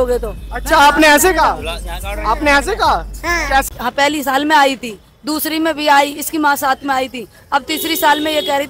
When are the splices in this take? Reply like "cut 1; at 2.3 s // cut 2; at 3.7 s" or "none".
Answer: cut 1; at 3.7 s